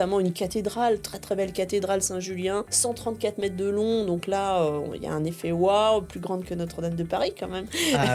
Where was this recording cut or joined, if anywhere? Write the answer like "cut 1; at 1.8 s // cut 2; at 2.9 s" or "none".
cut 1; at 2.7 s